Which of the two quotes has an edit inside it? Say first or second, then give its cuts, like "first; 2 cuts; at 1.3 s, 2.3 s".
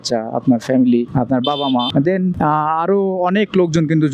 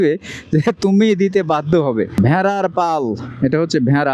second; 1 cut; at 2.2 s